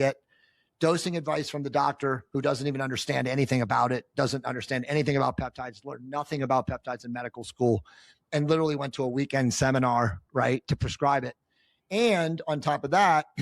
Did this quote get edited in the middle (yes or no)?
no